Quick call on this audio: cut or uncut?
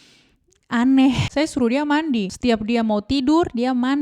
cut